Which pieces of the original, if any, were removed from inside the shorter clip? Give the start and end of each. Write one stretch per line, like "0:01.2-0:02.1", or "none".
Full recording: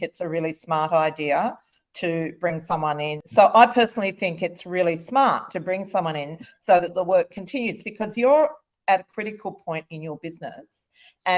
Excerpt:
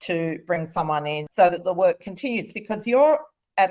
0:03.2-0:06.5

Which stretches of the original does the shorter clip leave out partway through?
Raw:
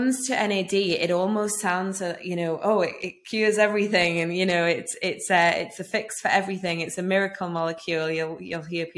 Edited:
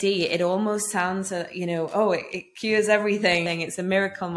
0:04.1-0:06.6

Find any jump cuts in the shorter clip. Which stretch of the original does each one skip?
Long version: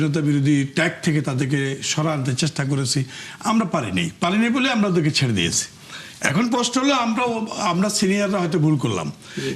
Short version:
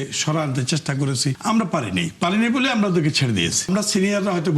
0:03.1-0:03.4
0:05.7-0:07.8

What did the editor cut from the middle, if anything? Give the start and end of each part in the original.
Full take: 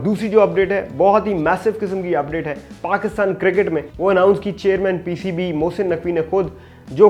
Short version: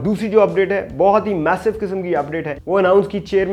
0:02.6-0:03.9

